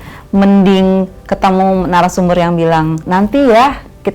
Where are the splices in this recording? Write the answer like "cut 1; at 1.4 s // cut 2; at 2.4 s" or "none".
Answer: cut 1; at 3.0 s